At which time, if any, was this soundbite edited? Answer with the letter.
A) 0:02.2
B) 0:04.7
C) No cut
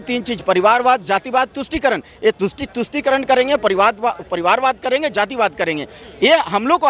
C